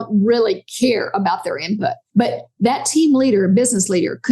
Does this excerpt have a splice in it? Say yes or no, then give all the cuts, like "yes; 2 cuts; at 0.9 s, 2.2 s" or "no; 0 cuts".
yes; 1 cut; at 2.0 s